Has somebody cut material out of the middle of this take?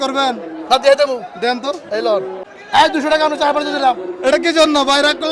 yes; 1 cut; at 2.4 s

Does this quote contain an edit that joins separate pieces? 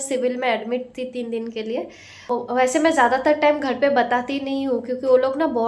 yes; 1 cut; at 2.3 s

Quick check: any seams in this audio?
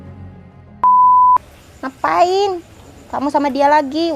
yes; 1 cut; at 1.4 s

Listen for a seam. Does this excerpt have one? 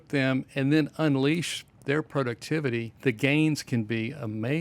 yes; 1 cut; at 2.9 s

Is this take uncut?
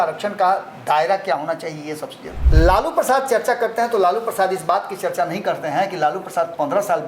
no; 1 cut; at 2.4 s

